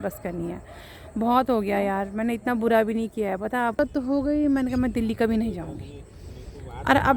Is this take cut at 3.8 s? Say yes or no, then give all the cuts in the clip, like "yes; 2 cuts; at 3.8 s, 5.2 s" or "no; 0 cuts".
yes; 1 cut; at 3.8 s